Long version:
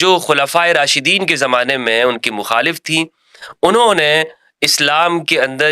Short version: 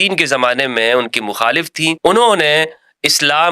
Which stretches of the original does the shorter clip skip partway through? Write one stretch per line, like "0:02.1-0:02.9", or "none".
0:03.1-0:03.6